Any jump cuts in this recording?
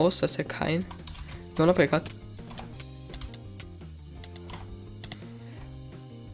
yes; 1 cut; at 3.3 s

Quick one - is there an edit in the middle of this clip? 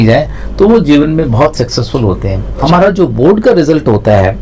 yes; 1 cut; at 2.6 s

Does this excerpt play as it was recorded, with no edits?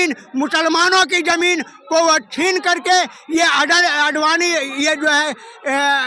yes; 0 cuts

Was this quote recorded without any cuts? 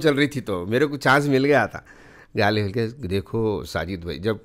yes; 0 cuts

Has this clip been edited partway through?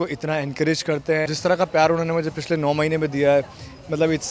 yes; 1 cut; at 1.3 s

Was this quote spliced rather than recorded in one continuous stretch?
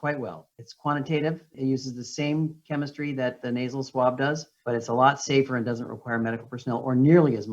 yes; 1 cut; at 1.5 s

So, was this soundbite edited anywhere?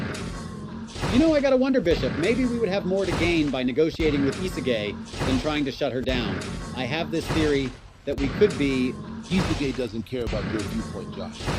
yes; 1 cut; at 1.0 s

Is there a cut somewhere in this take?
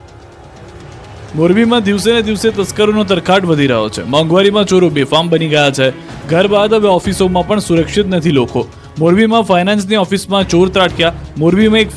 yes; 1 cut; at 5.2 s

